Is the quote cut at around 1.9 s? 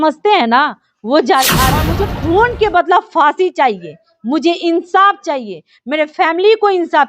yes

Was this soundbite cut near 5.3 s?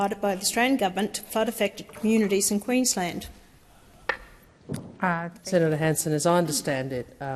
yes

